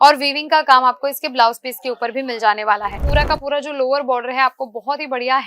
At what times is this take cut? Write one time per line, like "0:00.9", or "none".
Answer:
0:03.0